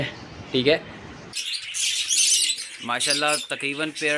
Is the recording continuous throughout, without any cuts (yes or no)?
no